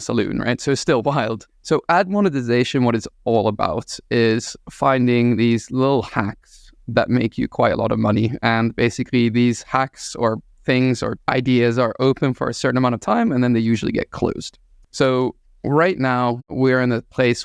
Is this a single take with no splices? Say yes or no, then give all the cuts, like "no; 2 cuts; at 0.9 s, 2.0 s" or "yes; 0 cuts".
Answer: yes; 0 cuts